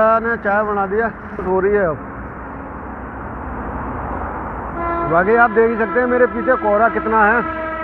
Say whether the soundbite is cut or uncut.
cut